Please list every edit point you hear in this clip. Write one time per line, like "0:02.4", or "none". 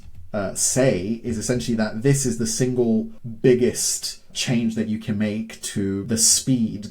0:03.2
0:04.3
0:06.0